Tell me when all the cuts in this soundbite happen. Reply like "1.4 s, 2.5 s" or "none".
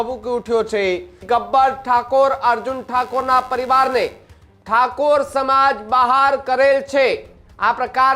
1.2 s